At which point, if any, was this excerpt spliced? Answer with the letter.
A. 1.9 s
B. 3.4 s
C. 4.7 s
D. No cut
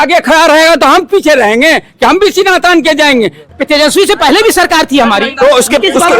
B